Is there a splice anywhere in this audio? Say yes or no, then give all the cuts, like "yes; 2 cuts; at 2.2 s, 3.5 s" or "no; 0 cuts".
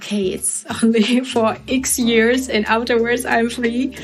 no; 0 cuts